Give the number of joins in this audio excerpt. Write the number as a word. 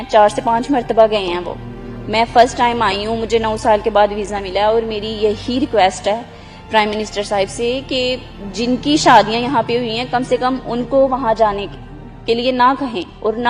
zero